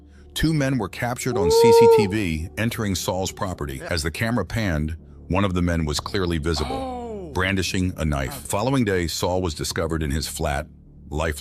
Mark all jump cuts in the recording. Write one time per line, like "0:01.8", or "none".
0:03.8
0:08.5